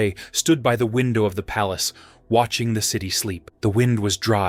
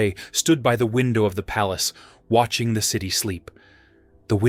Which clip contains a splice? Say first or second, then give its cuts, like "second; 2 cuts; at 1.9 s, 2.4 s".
first; 1 cut; at 3.4 s